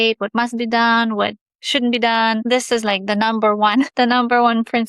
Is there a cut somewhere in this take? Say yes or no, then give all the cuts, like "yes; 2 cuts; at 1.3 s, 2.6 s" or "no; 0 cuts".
yes; 2 cuts; at 2.4 s, 3.9 s